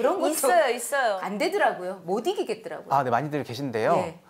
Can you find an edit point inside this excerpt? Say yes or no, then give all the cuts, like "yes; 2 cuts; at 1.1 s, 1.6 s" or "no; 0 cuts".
yes; 1 cut; at 1.2 s